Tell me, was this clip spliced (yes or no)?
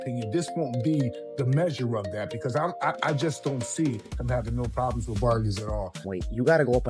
yes